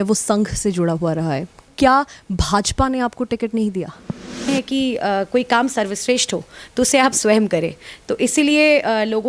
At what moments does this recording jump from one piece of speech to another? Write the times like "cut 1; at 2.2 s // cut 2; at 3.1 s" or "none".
cut 1; at 1.7 s // cut 2; at 4.4 s